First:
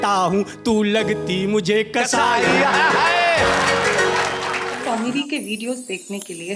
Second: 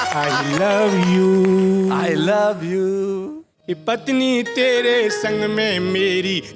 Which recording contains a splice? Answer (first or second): first